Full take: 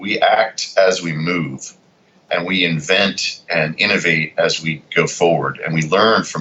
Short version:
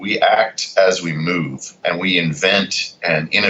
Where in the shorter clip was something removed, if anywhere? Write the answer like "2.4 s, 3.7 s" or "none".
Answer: 1.6 s